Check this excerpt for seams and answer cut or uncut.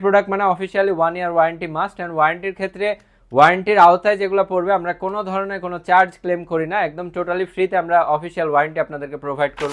uncut